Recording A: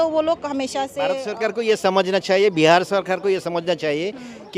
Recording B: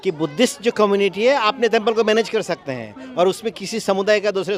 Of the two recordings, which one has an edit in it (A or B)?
A